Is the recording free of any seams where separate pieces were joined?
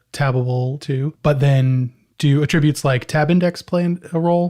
no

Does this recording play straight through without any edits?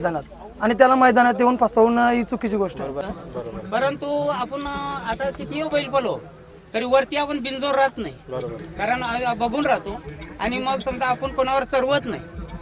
no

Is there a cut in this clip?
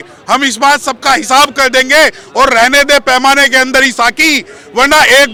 no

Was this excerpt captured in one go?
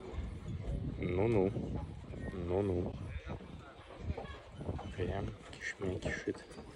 yes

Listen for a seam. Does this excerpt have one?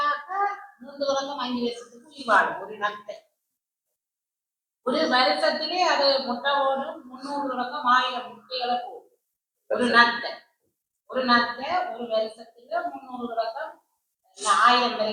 no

